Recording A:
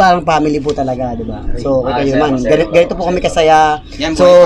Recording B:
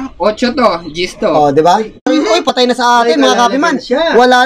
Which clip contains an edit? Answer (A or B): B